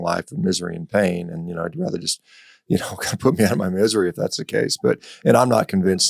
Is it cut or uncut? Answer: uncut